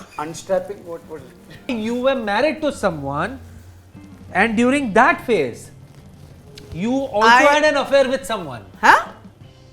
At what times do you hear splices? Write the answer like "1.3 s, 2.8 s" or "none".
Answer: 1.7 s